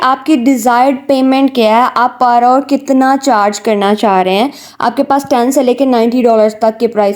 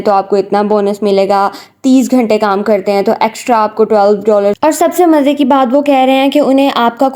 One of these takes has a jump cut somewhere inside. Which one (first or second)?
second